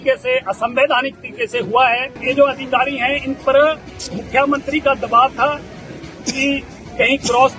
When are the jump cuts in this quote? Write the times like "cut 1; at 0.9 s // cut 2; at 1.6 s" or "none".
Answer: cut 1; at 2.2 s